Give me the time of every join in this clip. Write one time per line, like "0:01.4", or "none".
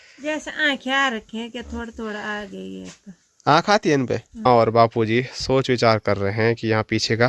0:04.5